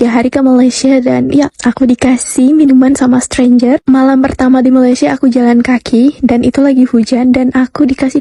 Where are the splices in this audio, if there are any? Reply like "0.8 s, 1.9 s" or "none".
none